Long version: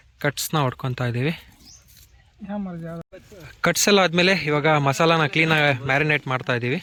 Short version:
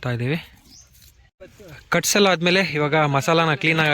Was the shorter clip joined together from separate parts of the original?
yes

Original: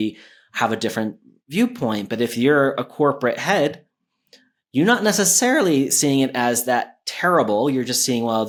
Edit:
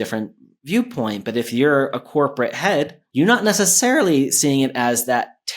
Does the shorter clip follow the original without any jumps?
no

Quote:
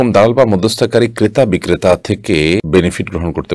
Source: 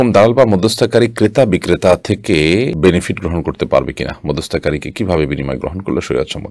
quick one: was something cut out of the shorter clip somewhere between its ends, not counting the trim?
yes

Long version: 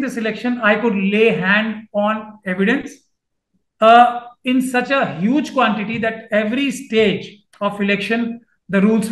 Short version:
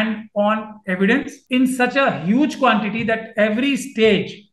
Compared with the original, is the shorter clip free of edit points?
no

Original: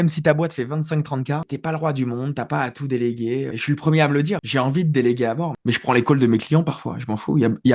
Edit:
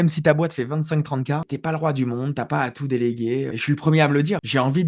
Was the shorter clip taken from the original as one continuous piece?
yes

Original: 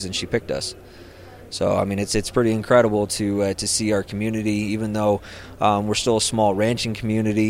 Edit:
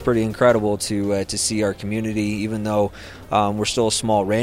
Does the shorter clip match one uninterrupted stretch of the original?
yes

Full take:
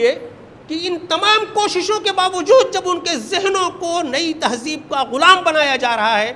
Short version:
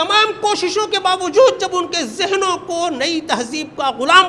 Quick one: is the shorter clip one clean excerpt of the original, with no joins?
yes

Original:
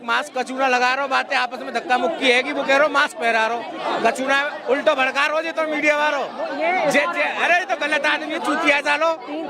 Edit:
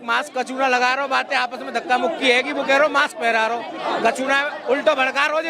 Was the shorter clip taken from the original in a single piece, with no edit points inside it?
yes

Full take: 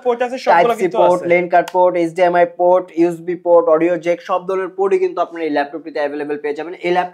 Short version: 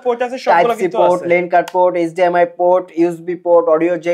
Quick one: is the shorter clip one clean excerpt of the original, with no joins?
yes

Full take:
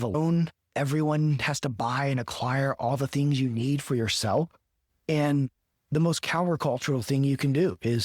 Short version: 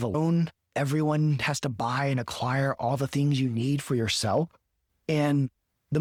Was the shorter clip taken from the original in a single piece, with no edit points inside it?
yes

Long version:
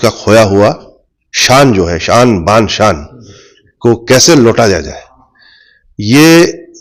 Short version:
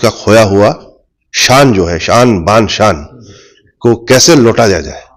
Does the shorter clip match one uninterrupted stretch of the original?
yes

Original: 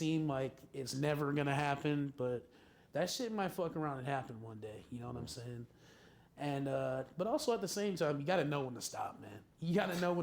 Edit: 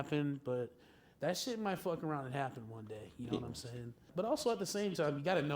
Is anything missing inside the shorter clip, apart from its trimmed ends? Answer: yes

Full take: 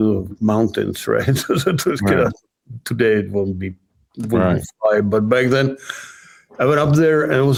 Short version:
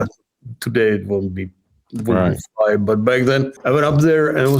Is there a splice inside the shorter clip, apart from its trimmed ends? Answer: yes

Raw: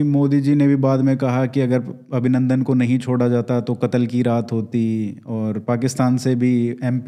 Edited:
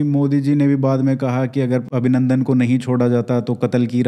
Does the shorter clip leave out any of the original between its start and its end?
yes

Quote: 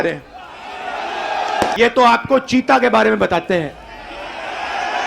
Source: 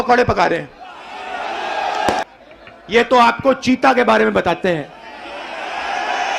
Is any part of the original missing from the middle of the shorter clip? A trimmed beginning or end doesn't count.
yes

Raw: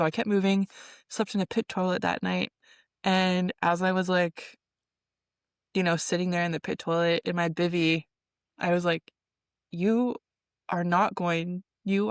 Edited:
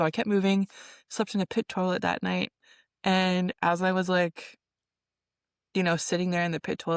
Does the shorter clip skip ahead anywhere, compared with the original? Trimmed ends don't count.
no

